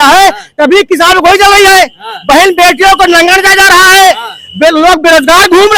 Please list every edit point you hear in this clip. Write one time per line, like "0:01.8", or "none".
none